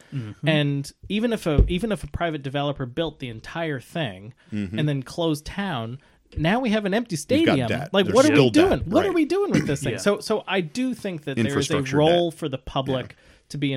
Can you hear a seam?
no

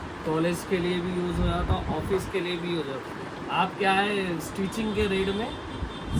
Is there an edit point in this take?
no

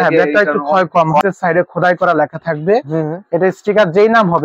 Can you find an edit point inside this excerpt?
yes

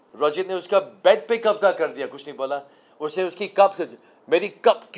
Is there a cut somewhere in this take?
no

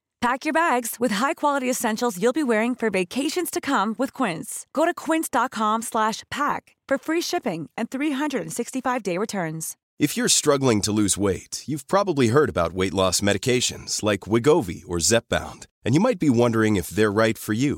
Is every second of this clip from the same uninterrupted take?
no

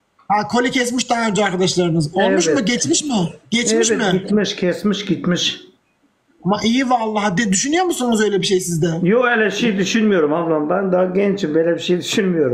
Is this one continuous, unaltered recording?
yes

